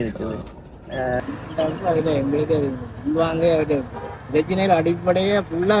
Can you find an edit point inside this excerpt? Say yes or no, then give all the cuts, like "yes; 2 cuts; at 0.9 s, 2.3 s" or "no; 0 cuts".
yes; 1 cut; at 1.2 s